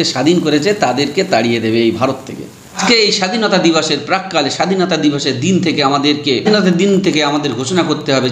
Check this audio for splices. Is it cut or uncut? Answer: cut